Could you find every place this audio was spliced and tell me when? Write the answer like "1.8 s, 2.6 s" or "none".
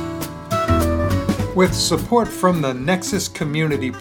1.5 s